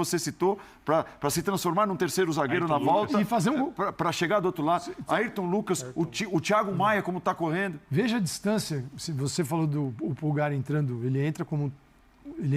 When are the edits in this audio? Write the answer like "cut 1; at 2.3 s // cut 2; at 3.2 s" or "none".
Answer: none